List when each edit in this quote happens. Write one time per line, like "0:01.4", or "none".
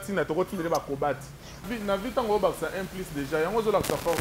0:01.7